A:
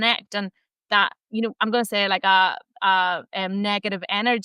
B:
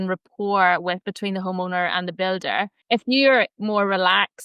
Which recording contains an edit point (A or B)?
B